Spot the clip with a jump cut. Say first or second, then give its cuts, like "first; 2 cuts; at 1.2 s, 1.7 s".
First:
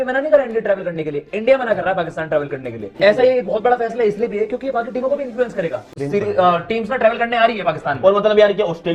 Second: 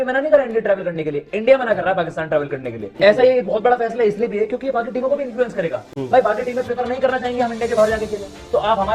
first; 1 cut; at 6.0 s